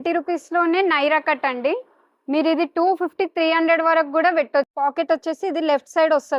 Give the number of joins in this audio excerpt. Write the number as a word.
one